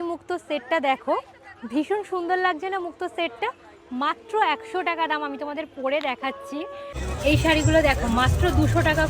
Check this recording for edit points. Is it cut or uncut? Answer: cut